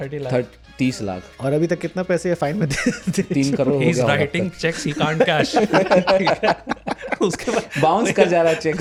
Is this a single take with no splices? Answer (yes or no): yes